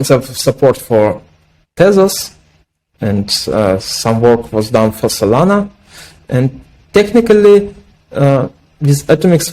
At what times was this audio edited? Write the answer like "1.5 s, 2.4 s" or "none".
none